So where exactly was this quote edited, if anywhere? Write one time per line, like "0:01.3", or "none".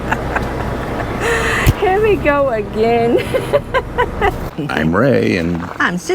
0:04.6